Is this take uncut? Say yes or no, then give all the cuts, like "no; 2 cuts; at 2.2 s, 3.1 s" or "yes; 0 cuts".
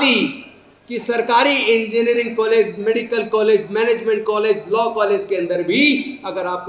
yes; 0 cuts